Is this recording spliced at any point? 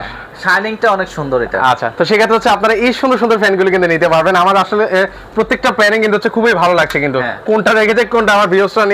no; 0 cuts

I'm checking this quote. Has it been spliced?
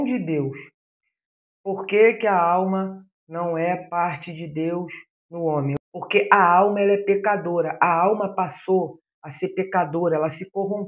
yes; 1 cut; at 5.7 s

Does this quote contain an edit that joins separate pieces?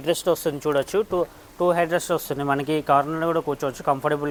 no; 0 cuts

